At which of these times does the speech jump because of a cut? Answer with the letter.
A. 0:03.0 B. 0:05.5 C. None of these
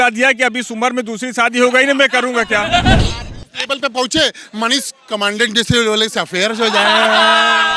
A